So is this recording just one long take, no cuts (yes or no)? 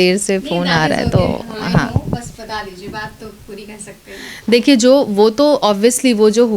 yes